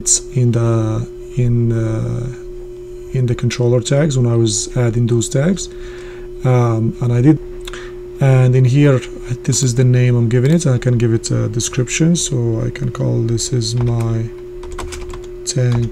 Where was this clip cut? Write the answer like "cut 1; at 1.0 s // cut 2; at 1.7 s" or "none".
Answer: cut 1; at 7.4 s